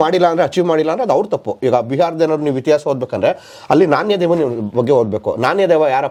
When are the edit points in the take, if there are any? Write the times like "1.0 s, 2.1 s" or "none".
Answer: none

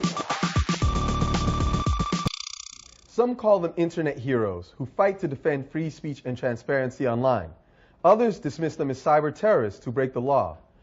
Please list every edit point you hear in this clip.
3.0 s

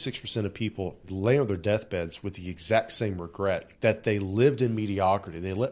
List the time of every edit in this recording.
1.1 s, 3.7 s

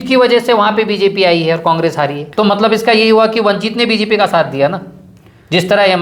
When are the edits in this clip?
2.2 s

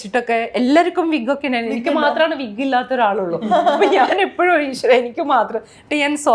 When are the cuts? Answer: none

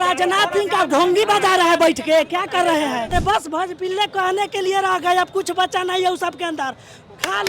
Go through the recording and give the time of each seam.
3.1 s

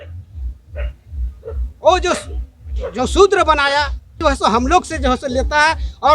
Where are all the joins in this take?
4.2 s

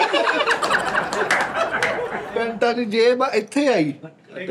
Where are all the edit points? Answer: 2.3 s

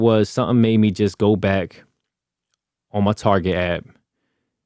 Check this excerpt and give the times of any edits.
none

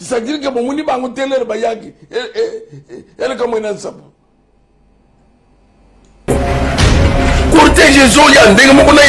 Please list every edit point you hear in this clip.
6.3 s

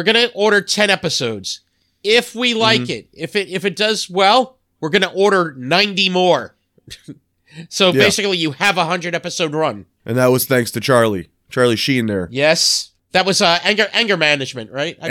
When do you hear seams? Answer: 9.9 s, 13.0 s

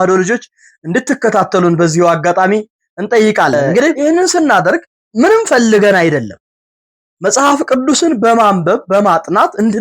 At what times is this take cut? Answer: 4.0 s, 5.0 s

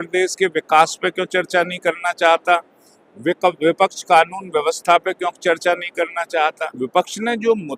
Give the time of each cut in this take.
6.7 s

